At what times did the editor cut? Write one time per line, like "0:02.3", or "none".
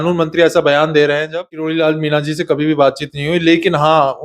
0:01.5